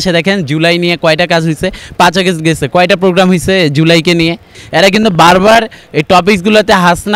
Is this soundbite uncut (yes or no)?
no